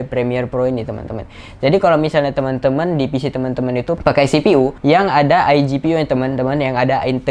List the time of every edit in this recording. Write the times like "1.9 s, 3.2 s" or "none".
4.0 s, 4.8 s